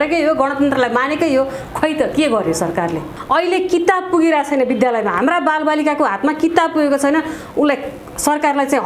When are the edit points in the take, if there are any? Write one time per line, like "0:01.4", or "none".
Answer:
0:03.1